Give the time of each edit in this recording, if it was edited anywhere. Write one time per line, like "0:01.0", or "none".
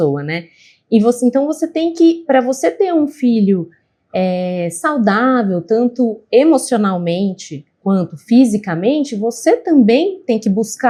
none